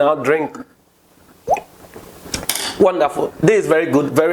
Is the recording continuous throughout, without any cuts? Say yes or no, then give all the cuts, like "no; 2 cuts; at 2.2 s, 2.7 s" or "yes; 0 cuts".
yes; 0 cuts